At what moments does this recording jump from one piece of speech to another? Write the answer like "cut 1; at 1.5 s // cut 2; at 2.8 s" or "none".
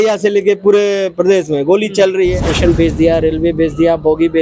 cut 1; at 2.5 s